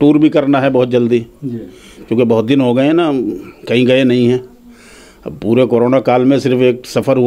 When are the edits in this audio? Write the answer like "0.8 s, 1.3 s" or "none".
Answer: none